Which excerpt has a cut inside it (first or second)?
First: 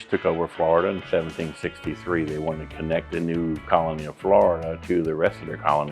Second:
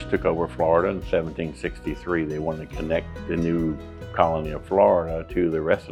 first